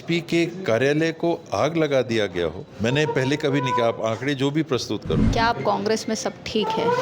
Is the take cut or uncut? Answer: cut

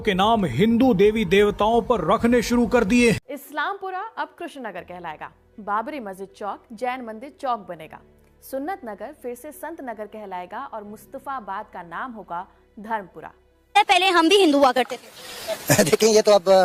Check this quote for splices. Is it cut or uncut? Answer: uncut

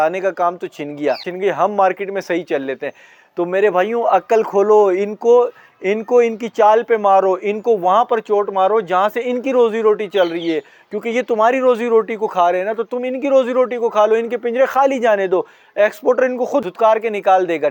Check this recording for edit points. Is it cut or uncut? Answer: uncut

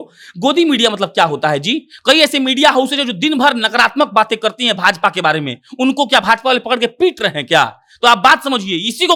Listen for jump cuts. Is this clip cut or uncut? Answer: uncut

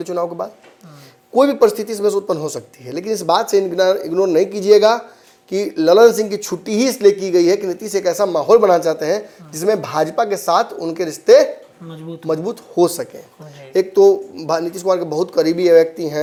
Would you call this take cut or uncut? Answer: uncut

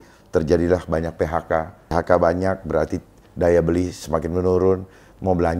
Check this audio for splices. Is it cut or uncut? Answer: cut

